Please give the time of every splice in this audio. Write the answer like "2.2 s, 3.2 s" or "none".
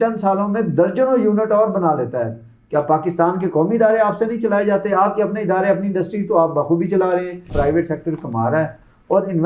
7.5 s